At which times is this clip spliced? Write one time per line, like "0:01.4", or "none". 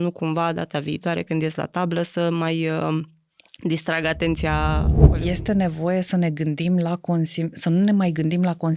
0:05.0